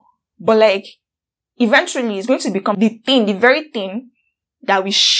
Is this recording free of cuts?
no; 1 cut; at 2.8 s

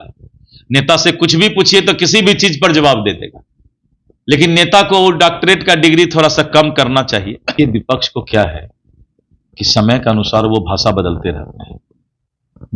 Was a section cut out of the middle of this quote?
yes; 1 cut; at 7.5 s

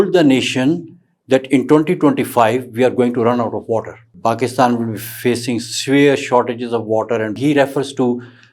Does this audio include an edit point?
yes; 2 cuts; at 4.0 s, 7.4 s

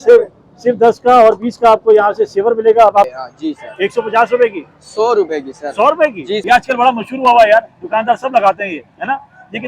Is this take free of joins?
no; 2 cuts; at 3.1 s, 6.4 s

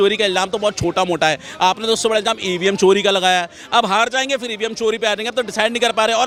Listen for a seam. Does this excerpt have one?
no; 0 cuts

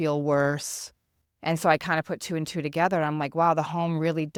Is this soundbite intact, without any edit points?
yes; 0 cuts

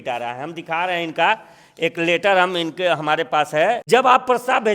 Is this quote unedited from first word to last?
no; 1 cut; at 3.8 s

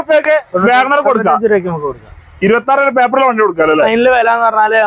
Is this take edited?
yes; 1 cut; at 3.9 s

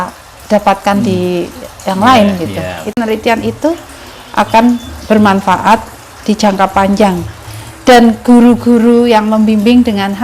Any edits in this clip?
yes; 1 cut; at 3.0 s

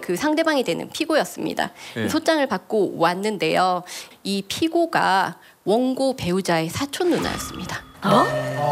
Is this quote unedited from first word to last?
yes; 0 cuts

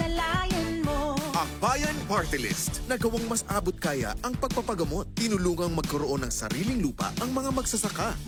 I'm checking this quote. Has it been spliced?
no; 0 cuts

